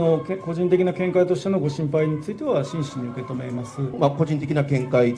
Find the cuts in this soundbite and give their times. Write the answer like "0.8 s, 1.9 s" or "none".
4.0 s